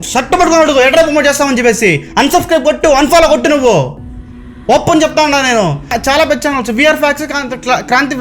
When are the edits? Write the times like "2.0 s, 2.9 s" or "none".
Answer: 5.9 s